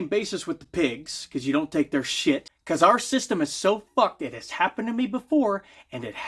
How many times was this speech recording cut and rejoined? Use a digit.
1